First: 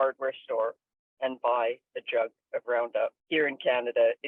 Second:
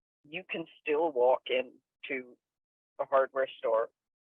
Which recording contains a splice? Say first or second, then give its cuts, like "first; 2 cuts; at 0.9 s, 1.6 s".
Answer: first; 1 cut; at 3.2 s